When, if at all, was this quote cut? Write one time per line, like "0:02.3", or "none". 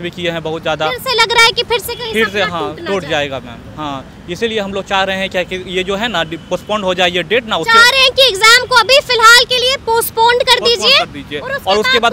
none